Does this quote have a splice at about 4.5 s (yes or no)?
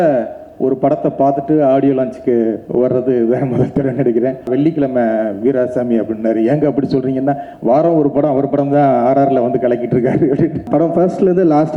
yes